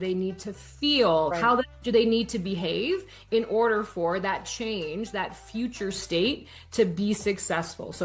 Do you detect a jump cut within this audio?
yes; 1 cut; at 1.3 s

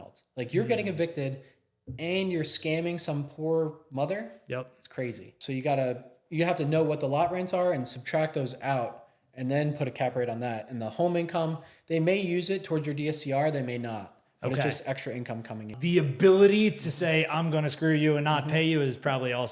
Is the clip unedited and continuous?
no; 2 cuts; at 5.3 s, 15.7 s

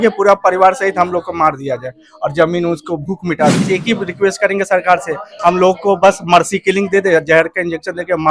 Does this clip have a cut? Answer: yes; 1 cut; at 3.6 s

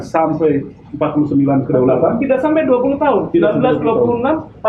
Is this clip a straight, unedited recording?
yes; 0 cuts

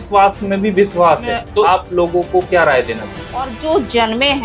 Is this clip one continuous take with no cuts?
no; 2 cuts; at 1.6 s, 3.5 s

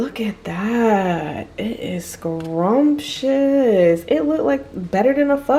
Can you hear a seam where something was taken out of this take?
no; 0 cuts

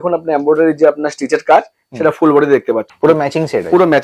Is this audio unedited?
no; 1 cut; at 2.9 s

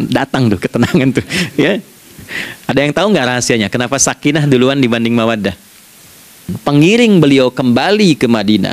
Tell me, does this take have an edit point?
yes; 1 cut; at 6.5 s

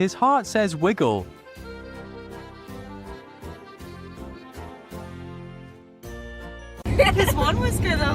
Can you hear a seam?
yes; 1 cut; at 6.8 s

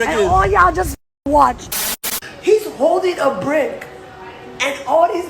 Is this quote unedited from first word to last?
no; 1 cut; at 2.2 s

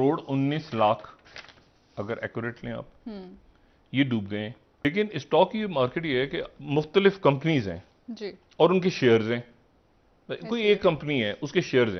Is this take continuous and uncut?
yes; 0 cuts

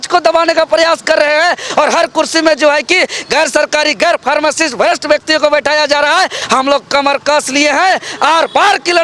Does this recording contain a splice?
no; 0 cuts

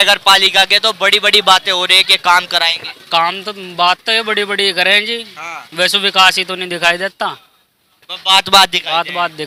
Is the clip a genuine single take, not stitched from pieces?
yes; 0 cuts

